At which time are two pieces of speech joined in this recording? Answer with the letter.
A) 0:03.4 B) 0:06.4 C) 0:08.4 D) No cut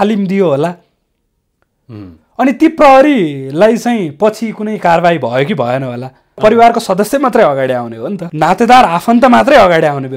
B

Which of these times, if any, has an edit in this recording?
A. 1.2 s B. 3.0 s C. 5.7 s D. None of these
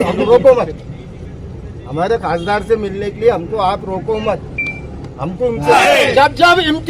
C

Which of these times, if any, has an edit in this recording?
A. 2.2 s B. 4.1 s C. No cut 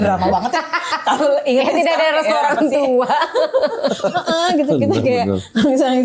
C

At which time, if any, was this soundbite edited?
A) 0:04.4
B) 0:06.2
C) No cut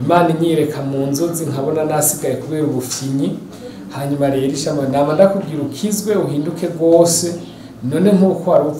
C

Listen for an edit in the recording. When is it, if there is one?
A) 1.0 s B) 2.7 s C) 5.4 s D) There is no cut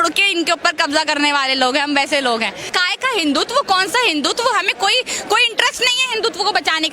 B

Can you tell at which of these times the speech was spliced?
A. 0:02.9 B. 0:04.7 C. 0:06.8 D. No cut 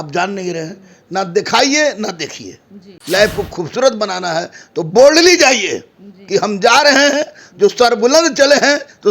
A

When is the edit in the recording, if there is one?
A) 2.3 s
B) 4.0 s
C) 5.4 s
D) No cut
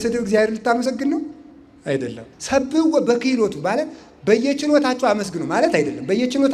A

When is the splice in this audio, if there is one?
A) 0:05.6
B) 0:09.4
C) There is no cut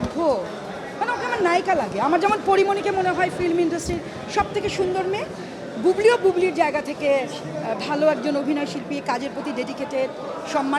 C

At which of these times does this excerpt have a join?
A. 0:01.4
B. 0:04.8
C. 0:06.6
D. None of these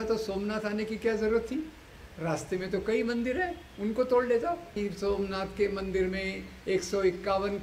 B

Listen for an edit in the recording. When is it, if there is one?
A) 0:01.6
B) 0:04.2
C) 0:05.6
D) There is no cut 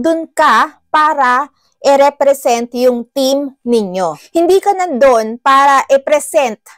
B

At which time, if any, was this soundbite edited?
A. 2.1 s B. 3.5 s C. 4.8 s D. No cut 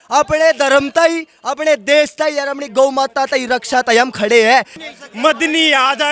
C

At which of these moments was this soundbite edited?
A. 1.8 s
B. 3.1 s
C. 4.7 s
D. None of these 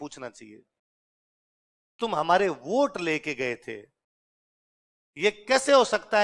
D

